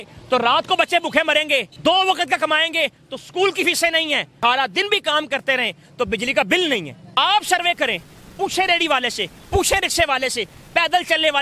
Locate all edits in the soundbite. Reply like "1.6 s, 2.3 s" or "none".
1.7 s, 4.3 s, 7.1 s